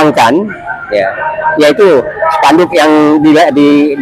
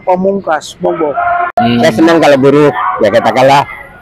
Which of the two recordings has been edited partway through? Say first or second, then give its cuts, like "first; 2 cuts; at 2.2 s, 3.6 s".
second; 1 cut; at 1.6 s